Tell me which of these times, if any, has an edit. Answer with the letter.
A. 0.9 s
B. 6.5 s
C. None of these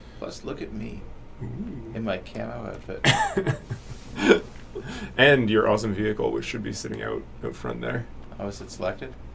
A